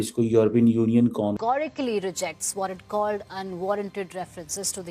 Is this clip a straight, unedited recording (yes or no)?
no